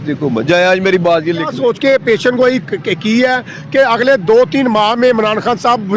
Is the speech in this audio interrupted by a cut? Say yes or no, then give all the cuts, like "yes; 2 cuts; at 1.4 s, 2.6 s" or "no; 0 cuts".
yes; 1 cut; at 1.5 s